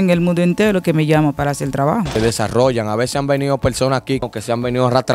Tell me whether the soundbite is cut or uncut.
cut